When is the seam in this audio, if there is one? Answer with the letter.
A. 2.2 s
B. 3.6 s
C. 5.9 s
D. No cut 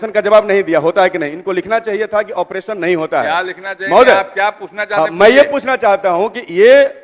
D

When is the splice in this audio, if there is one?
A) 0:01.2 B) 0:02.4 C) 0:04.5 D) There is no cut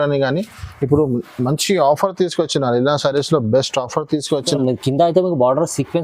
C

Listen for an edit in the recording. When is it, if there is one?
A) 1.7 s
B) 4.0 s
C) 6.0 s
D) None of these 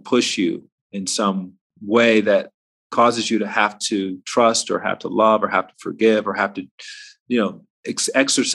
A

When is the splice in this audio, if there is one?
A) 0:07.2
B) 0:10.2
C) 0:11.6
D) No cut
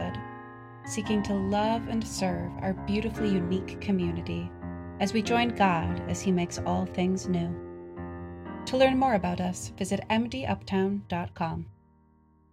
C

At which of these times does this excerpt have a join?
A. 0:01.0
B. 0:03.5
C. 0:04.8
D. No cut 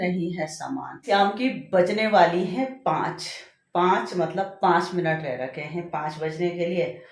A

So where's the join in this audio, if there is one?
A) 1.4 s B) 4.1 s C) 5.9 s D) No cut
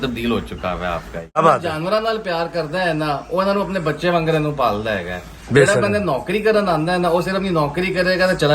A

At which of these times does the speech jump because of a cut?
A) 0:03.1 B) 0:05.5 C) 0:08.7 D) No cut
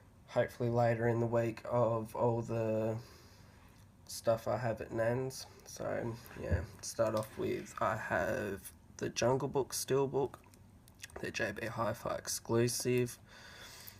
B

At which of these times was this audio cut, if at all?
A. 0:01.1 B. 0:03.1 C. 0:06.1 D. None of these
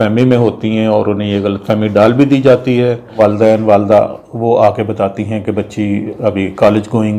B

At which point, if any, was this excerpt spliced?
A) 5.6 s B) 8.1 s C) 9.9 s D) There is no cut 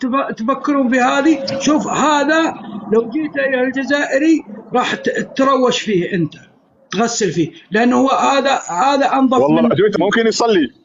C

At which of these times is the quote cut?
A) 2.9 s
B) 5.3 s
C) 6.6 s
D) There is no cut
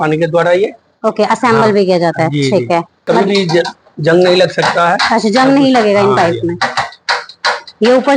A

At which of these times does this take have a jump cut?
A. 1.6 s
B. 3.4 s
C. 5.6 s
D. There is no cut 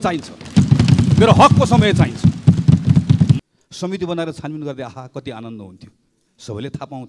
B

